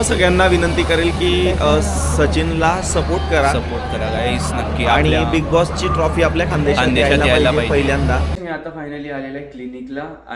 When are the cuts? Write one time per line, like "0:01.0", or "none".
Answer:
0:08.3